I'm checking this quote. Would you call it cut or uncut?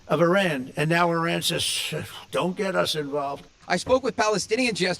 cut